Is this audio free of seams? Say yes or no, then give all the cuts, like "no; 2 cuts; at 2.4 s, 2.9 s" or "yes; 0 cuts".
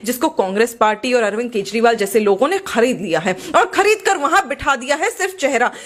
yes; 0 cuts